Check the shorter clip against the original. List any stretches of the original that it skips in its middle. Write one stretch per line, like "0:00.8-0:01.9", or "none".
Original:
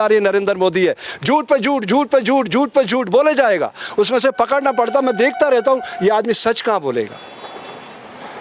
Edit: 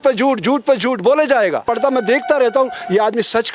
0:03.8-0:04.8